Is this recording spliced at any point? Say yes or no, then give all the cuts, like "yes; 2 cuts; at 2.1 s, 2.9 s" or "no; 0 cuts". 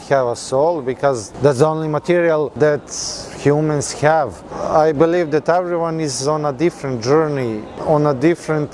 yes; 4 cuts; at 1.3 s, 2.5 s, 4.6 s, 7.7 s